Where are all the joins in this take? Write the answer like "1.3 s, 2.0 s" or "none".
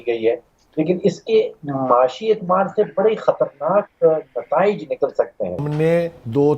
5.7 s